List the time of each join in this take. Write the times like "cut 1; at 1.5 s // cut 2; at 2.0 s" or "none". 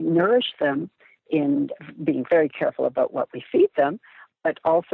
none

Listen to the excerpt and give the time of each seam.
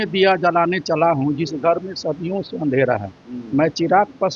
none

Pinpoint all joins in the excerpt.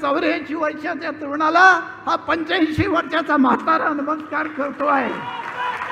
none

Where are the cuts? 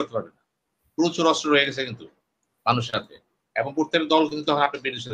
none

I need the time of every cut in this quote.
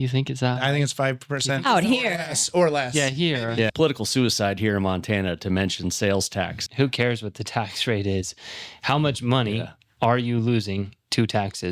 cut 1; at 3.7 s // cut 2; at 6.6 s

